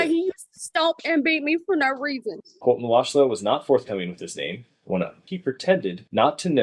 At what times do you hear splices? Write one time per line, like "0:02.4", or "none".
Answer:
0:02.4
0:05.2